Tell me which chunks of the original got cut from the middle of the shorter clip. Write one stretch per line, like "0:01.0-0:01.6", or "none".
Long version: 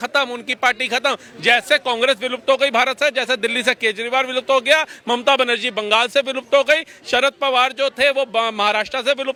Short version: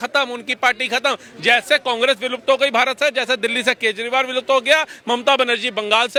none